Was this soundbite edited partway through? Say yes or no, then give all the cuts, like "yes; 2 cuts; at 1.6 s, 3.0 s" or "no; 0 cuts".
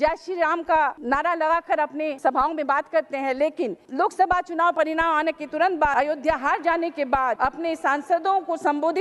yes; 5 cuts; at 1.0 s, 2.1 s, 3.8 s, 5.9 s, 7.4 s